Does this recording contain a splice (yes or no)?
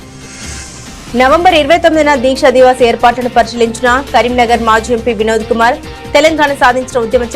yes